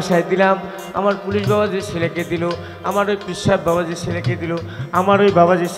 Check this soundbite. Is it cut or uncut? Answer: uncut